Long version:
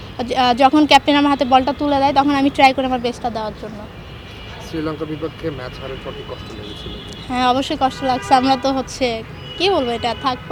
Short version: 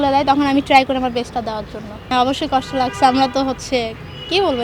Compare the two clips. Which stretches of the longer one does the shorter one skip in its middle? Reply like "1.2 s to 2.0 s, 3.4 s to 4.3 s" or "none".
4.0 s to 7.4 s